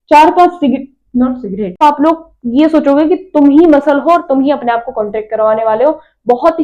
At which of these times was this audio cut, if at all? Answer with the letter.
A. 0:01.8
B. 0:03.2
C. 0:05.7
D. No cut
A